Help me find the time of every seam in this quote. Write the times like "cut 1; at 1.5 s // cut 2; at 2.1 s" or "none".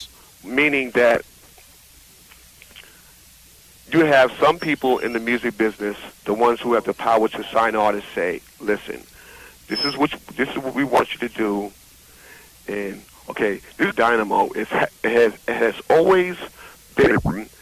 none